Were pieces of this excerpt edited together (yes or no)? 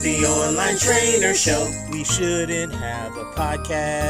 no